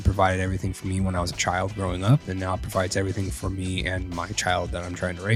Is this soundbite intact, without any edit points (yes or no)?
yes